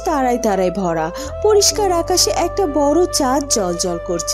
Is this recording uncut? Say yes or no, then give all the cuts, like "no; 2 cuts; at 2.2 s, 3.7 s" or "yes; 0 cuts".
yes; 0 cuts